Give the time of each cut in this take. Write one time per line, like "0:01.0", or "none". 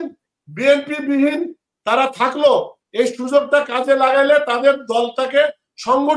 none